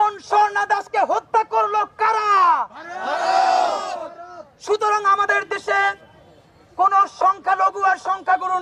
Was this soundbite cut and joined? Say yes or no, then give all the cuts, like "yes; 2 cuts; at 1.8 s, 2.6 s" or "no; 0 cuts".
no; 0 cuts